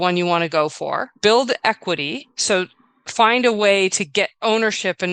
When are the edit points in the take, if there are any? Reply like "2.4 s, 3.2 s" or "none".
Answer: 1.1 s